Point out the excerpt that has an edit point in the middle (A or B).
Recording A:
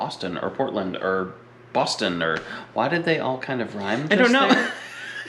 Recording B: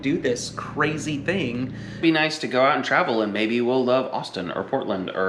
B